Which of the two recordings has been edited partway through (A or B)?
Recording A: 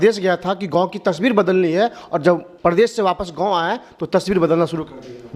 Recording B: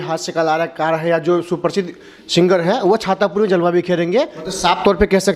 B